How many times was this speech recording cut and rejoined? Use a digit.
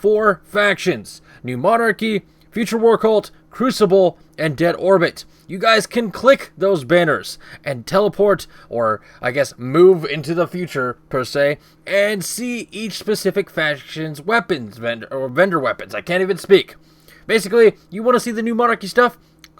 1